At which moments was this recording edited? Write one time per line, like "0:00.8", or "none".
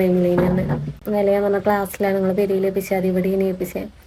none